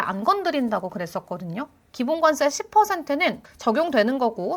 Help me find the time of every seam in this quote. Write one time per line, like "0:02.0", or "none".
0:03.4